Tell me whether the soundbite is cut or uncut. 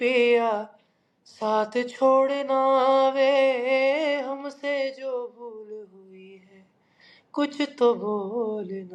uncut